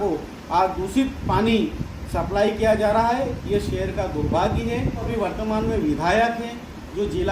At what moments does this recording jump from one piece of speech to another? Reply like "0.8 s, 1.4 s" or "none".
5.1 s